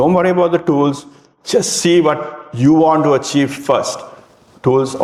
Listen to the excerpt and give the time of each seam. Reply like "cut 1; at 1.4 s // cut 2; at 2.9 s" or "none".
none